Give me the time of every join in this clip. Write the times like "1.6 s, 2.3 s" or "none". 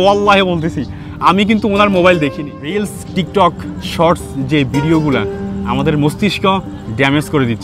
2.3 s